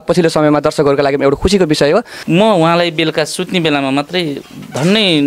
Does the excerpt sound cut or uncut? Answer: cut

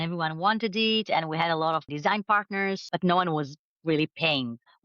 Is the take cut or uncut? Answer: cut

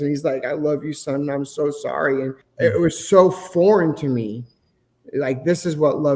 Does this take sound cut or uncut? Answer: cut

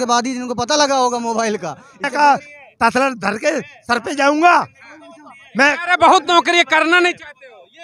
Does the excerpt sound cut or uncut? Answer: cut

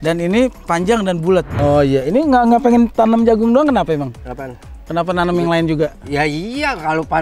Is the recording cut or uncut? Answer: cut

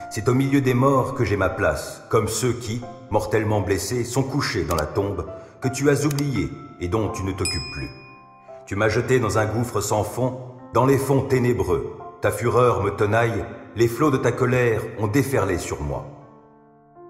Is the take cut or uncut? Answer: cut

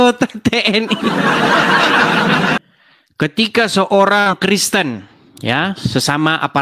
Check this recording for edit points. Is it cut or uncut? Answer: cut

